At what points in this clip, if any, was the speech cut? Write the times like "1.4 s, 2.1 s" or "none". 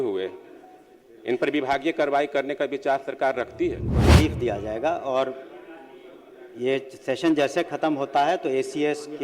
4.1 s